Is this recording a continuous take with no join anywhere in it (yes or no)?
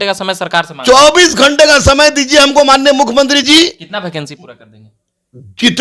yes